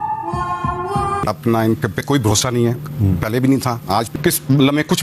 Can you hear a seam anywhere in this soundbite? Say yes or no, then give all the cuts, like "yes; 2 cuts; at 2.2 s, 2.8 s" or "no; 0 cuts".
yes; 1 cut; at 4.1 s